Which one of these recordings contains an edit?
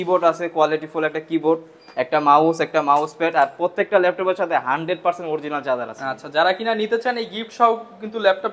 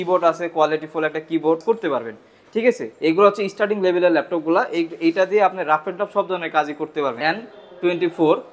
second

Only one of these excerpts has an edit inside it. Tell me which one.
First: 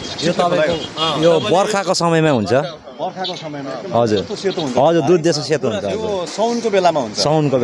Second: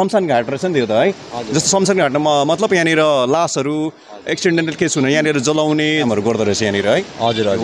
second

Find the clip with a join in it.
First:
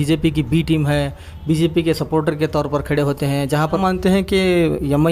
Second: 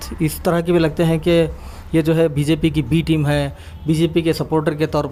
first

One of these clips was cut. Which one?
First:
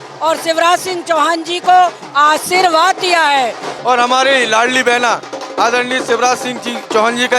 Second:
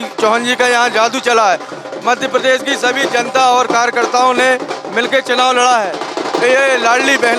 first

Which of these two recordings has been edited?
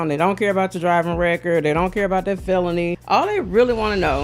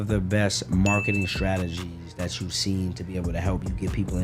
first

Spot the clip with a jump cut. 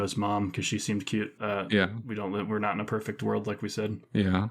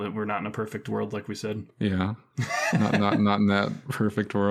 first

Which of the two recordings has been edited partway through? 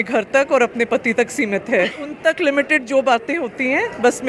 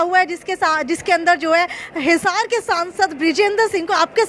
first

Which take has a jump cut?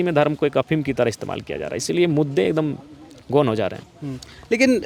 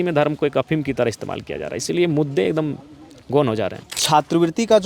second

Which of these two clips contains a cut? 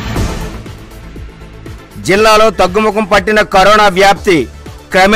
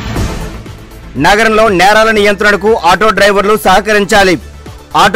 first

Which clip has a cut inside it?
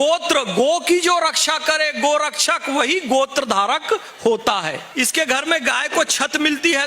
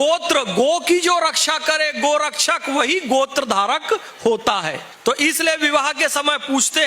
first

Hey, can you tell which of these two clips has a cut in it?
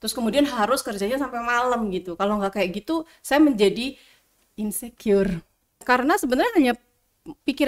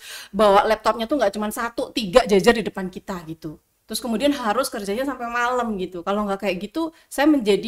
first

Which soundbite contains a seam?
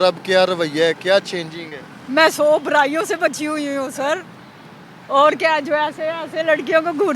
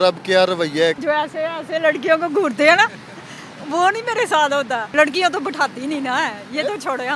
second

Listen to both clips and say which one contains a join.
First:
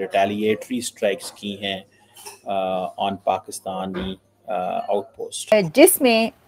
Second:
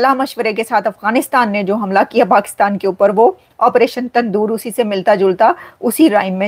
first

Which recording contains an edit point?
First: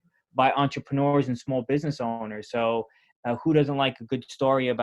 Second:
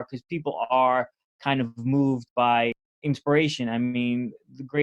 second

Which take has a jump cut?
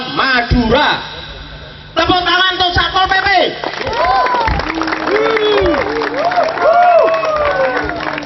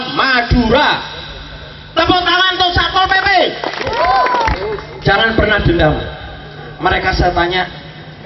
second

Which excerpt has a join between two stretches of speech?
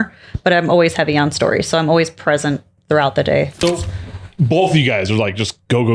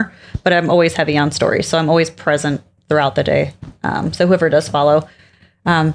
first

